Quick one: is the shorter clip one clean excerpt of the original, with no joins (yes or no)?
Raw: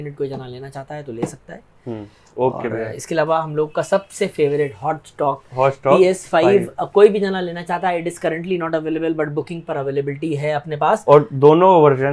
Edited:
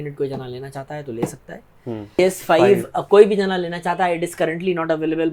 no